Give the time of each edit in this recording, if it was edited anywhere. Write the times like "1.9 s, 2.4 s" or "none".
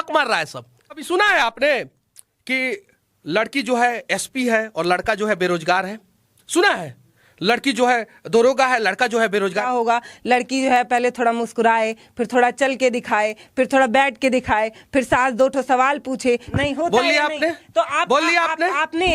1.0 s, 9.7 s, 16.5 s